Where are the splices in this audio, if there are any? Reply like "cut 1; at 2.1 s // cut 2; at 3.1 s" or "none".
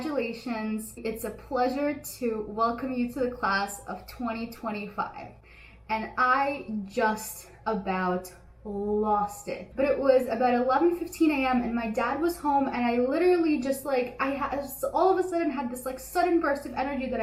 none

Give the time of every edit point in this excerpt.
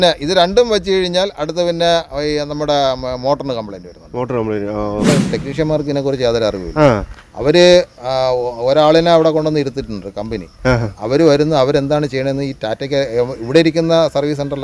cut 1; at 5.1 s

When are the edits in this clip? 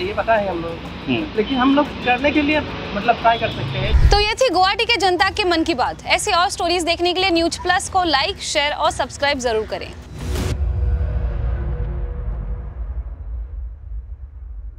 none

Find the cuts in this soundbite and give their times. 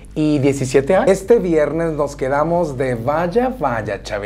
cut 1; at 1.1 s

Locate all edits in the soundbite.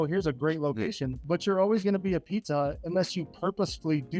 cut 1; at 1.1 s

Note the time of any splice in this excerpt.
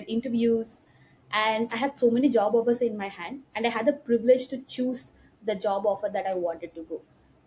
none

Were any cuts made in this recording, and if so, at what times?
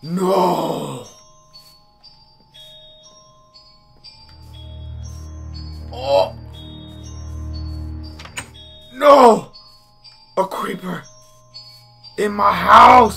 none

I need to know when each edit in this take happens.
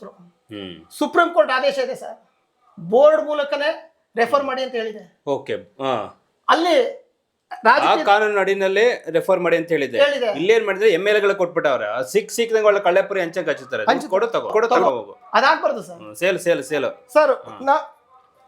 none

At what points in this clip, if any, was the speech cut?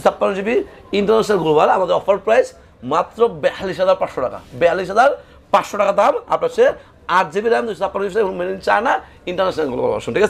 none

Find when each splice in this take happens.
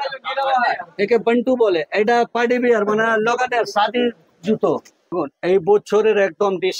cut 1; at 5.1 s

